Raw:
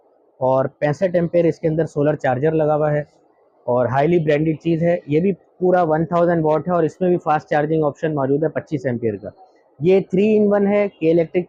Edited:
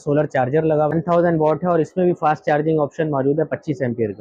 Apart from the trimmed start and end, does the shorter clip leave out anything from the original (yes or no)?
yes